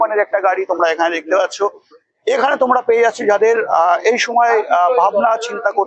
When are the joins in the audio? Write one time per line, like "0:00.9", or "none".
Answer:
none